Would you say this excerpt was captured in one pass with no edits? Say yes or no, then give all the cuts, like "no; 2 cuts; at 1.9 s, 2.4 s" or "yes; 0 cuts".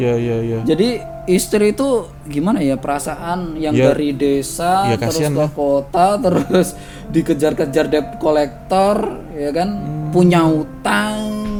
yes; 0 cuts